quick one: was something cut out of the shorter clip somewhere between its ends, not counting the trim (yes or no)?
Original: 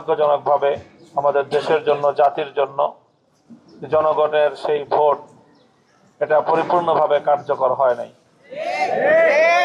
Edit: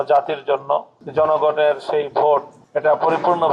yes